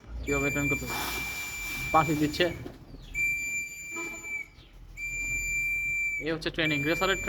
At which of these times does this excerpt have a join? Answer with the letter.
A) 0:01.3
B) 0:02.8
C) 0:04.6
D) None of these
D